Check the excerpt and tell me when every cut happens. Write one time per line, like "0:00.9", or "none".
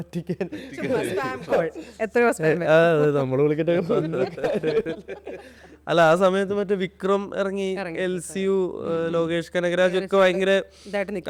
none

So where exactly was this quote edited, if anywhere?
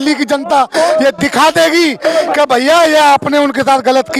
none

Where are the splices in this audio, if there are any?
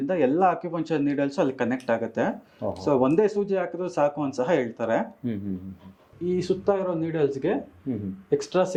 none

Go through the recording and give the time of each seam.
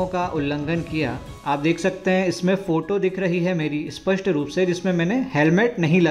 none

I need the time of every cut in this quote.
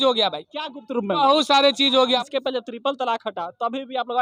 0:02.2

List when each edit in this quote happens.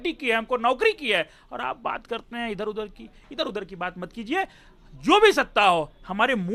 none

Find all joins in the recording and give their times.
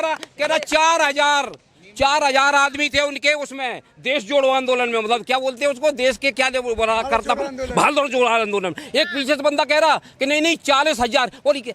none

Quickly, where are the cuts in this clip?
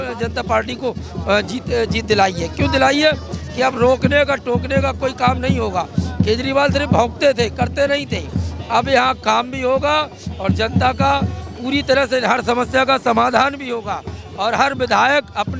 none

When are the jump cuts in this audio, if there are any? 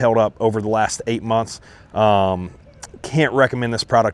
none

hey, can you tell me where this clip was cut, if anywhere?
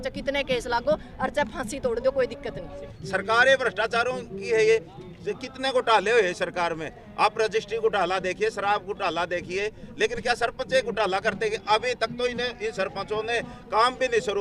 0:02.9

